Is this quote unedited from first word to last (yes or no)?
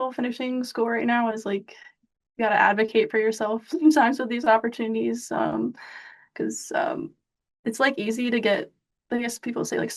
yes